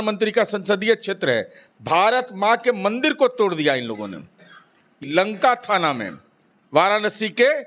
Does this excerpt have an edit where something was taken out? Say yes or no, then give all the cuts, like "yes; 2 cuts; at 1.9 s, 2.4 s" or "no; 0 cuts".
yes; 1 cut; at 5.0 s